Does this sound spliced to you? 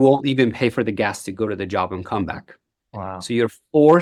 no; 0 cuts

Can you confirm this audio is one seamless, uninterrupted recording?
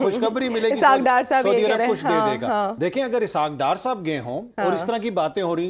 yes; 0 cuts

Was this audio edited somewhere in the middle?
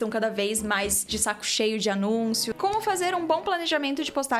yes; 1 cut; at 2.5 s

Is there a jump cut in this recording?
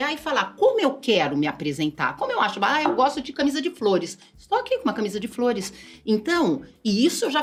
no; 0 cuts

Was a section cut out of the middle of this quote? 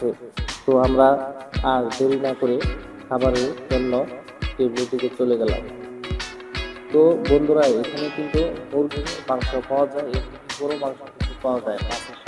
no; 0 cuts

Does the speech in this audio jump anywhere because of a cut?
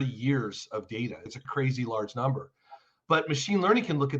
yes; 1 cut; at 1.2 s

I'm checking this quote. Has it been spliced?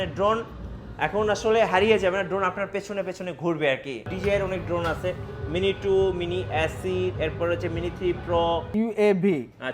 yes; 2 cuts; at 4.1 s, 8.7 s

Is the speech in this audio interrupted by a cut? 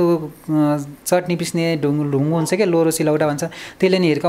no; 0 cuts

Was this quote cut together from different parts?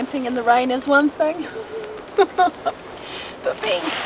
no; 0 cuts

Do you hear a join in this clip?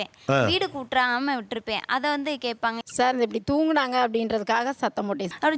no; 0 cuts

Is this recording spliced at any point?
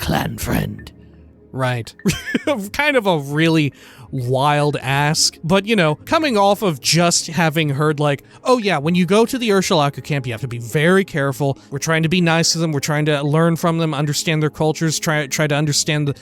yes; 1 cut; at 11.7 s

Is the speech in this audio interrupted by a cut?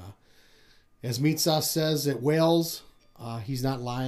no; 0 cuts

